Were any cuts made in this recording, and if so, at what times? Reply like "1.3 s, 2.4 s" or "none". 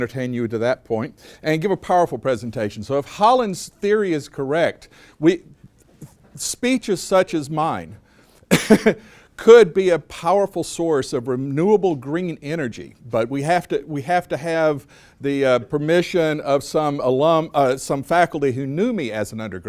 16.1 s